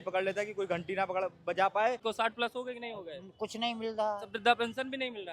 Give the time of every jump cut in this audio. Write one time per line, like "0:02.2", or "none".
0:02.0